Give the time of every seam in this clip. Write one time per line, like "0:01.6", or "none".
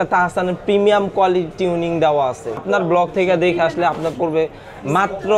0:02.6